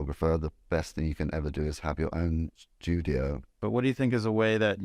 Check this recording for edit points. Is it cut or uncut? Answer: cut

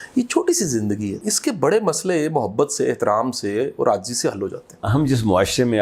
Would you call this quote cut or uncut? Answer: cut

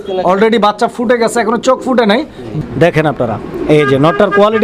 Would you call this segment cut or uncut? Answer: cut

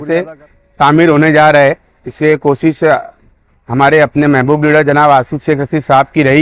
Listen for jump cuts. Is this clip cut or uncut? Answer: uncut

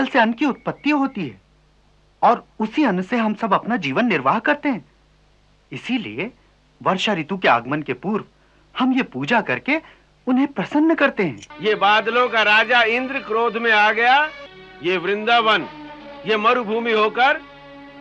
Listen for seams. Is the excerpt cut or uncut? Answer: cut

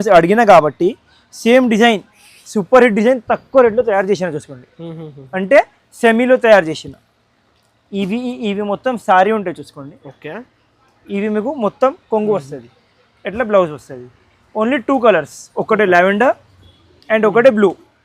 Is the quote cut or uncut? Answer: uncut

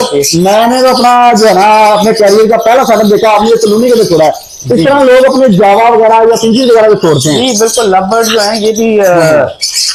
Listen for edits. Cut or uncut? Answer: uncut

